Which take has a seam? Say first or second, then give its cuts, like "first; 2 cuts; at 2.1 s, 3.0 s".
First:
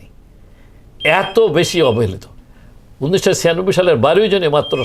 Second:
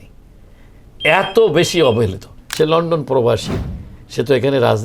second; 1 cut; at 2.4 s